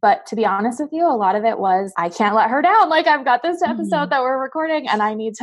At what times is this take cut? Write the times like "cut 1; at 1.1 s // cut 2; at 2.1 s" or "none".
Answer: cut 1; at 1.9 s